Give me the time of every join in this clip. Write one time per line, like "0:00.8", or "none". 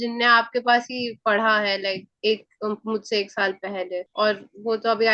none